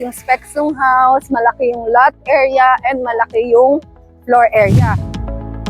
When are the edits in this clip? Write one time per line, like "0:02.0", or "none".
0:04.8